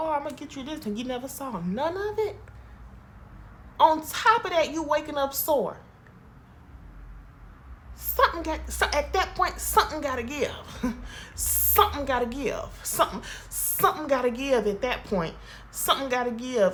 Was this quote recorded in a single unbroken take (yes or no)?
yes